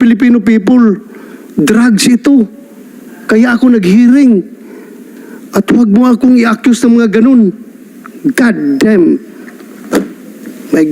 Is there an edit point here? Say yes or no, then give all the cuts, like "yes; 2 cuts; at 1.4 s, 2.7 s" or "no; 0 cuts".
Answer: no; 0 cuts